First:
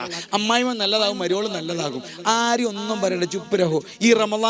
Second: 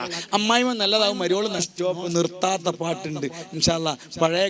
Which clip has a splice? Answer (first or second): second